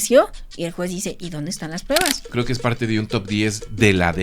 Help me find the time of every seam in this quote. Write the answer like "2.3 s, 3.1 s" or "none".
2.2 s